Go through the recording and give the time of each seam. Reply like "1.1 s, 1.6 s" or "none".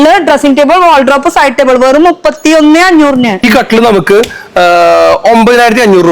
3.4 s